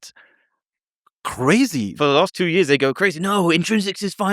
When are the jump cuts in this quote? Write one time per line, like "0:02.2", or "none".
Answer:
0:02.0